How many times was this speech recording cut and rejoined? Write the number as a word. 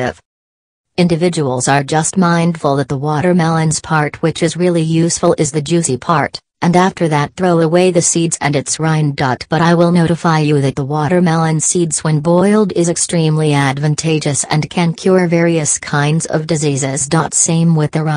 zero